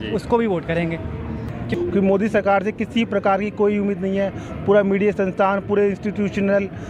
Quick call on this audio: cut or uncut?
cut